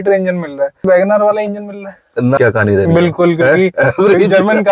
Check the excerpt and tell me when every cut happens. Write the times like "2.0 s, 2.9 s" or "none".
0.8 s, 2.4 s